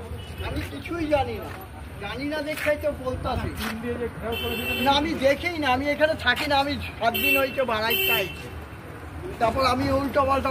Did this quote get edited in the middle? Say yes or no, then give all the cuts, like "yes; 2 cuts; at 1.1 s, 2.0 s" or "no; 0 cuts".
no; 0 cuts